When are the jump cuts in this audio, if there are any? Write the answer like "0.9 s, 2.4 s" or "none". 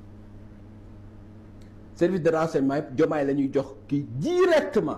none